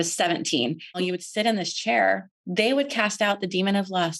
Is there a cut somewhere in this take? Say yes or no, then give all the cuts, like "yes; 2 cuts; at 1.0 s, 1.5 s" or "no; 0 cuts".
yes; 2 cuts; at 1.0 s, 2.4 s